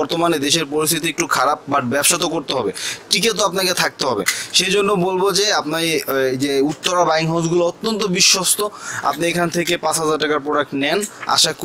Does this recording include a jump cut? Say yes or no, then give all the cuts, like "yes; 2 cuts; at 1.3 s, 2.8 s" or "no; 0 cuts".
no; 0 cuts